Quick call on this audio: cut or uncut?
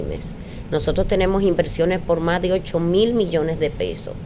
uncut